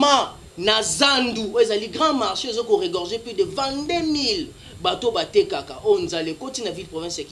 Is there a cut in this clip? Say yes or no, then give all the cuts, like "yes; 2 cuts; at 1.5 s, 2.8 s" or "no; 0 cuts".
no; 0 cuts